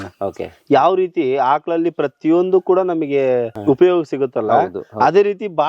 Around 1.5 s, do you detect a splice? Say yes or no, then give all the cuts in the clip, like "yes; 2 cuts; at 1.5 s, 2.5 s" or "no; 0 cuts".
no; 1 cut; at 3.5 s